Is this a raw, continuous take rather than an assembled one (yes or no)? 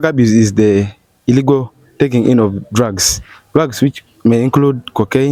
yes